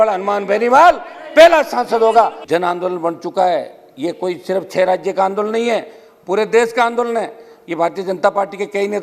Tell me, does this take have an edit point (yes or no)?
yes